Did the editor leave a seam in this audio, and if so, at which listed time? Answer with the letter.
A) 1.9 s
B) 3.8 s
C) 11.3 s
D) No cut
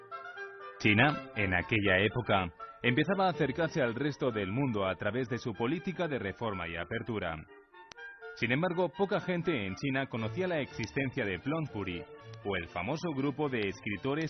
B